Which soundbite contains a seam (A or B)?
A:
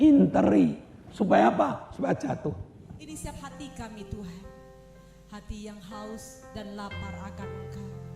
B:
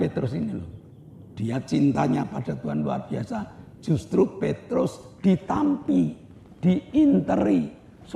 A